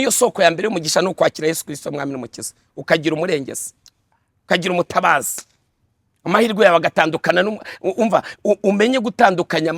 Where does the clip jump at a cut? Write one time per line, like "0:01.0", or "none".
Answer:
none